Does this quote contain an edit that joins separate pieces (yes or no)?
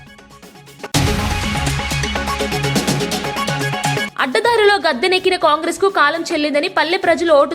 yes